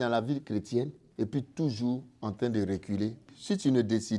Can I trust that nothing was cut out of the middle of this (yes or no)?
no